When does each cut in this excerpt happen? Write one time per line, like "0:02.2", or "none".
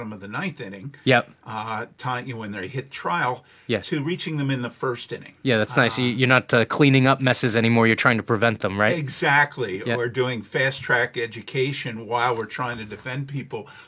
none